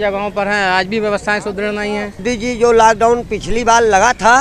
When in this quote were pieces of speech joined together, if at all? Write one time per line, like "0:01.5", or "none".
0:02.2